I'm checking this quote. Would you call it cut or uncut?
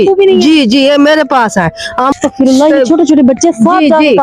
cut